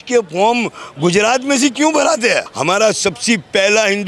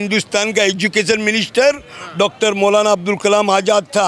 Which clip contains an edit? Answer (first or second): first